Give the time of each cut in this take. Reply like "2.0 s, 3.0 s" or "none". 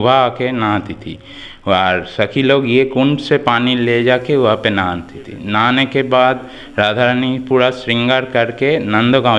none